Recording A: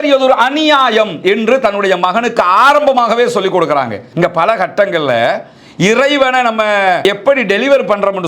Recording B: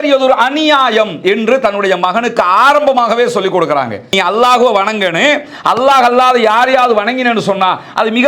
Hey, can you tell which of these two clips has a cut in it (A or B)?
A